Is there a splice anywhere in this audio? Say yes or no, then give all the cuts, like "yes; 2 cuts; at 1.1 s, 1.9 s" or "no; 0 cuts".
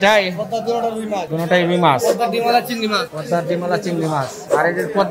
no; 0 cuts